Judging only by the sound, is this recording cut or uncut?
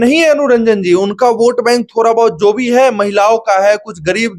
uncut